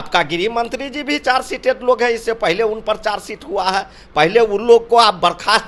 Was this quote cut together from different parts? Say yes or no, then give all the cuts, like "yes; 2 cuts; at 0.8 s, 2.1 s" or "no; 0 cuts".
no; 0 cuts